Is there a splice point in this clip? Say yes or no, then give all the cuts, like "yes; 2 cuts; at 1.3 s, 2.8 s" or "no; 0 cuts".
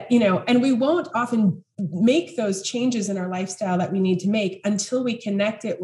no; 0 cuts